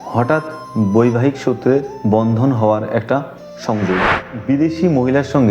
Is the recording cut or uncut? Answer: cut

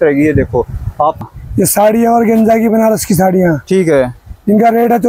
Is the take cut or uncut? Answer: cut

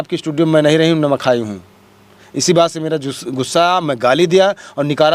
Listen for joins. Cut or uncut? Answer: uncut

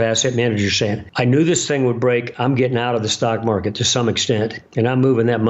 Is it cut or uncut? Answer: cut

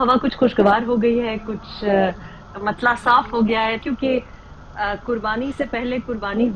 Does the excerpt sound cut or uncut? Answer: cut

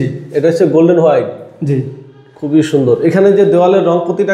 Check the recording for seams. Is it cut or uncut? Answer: uncut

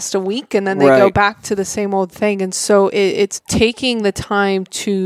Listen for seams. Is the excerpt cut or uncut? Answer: cut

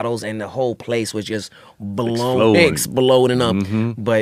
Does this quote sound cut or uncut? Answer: uncut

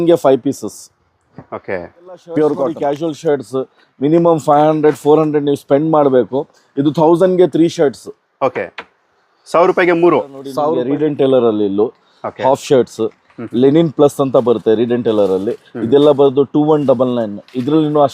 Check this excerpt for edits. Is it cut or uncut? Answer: cut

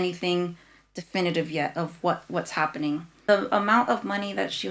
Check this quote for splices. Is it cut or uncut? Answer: cut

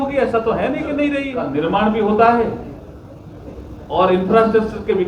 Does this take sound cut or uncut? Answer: cut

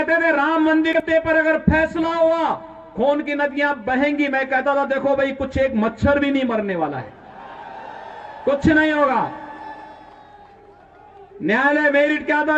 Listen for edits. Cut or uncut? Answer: cut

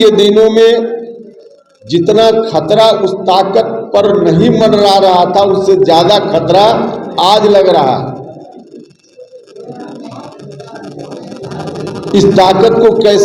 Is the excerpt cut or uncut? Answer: uncut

